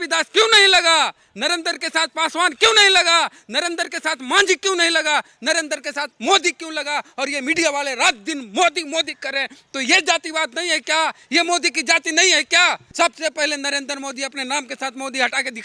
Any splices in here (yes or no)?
yes